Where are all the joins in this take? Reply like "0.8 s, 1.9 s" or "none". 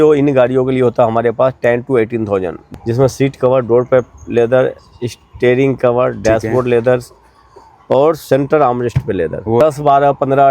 2.7 s, 9.6 s